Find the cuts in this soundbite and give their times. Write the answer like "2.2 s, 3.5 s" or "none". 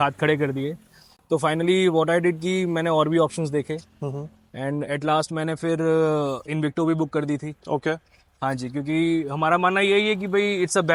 none